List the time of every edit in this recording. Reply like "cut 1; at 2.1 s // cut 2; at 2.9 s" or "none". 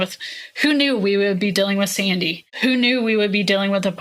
cut 1; at 2.4 s